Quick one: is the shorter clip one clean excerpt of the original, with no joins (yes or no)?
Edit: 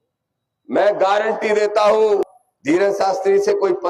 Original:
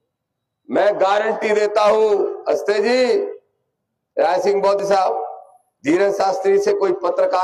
no